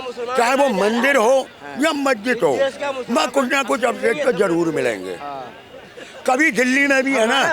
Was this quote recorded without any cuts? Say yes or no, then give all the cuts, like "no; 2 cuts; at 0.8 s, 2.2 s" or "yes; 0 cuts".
yes; 0 cuts